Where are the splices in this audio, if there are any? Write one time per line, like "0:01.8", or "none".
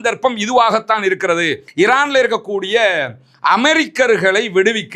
0:01.6